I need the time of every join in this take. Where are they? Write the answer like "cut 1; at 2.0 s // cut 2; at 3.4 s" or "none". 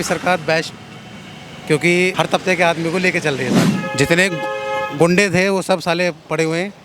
cut 1; at 2.1 s // cut 2; at 3.7 s